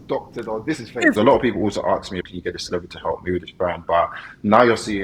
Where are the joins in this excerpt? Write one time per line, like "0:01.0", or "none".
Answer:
0:01.1
0:02.2